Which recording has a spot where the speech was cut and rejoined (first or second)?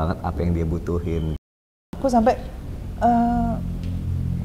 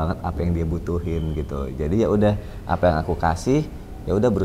first